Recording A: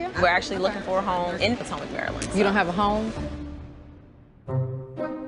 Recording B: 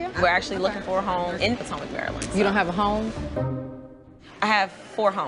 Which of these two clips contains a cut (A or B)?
B